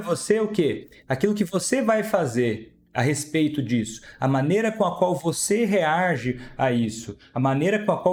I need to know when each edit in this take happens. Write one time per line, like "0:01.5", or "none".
none